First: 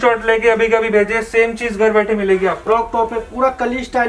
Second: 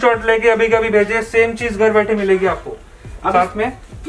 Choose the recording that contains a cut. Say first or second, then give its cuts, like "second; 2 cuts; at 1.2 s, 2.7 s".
first; 1 cut; at 2.6 s